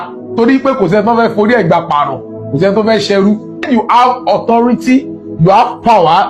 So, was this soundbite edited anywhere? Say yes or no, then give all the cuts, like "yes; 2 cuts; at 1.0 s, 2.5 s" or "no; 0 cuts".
yes; 1 cut; at 3.6 s